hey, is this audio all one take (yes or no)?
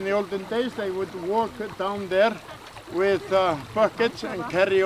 yes